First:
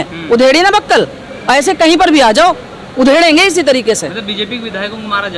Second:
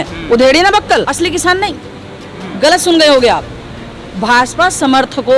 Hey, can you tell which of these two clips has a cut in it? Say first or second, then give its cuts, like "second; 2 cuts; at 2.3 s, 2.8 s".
second; 1 cut; at 1.1 s